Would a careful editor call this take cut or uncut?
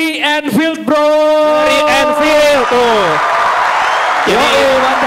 uncut